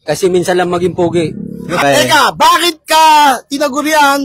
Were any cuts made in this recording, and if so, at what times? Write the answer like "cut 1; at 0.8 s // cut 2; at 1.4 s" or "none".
cut 1; at 1.8 s